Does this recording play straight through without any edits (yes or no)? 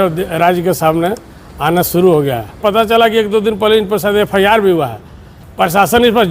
no